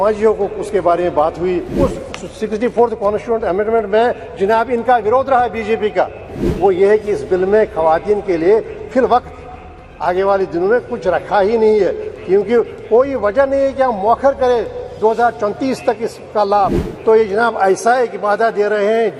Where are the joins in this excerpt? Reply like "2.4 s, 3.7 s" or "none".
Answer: 1.7 s, 6.5 s, 16.9 s